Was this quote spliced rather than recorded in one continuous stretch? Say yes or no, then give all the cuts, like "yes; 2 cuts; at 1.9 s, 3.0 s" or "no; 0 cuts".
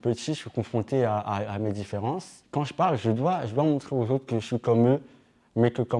yes; 1 cut; at 2.4 s